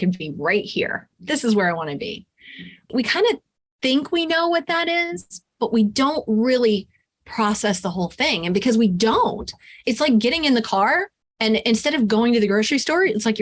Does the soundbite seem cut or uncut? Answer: cut